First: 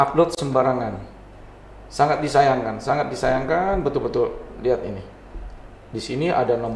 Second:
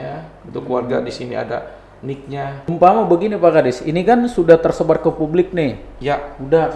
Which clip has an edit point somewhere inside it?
second; 1 cut; at 2.7 s

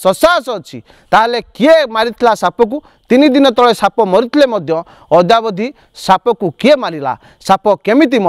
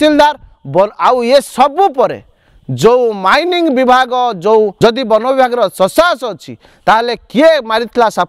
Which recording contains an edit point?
second; 1 cut; at 4.8 s

